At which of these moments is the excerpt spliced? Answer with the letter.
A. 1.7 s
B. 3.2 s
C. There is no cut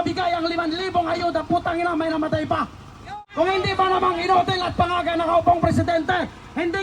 B